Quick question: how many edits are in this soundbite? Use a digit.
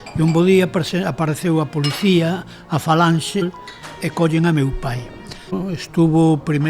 2